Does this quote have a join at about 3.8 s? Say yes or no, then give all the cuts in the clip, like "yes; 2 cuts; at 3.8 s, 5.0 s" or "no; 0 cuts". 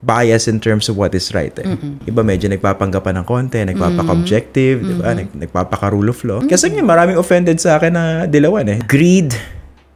no; 3 cuts; at 2.0 s, 6.4 s, 8.8 s